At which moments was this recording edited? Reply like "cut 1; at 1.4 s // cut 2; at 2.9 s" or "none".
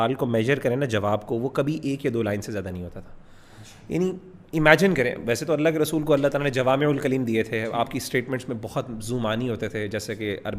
none